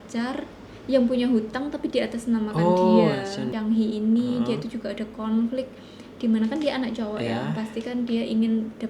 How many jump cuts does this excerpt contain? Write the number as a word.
one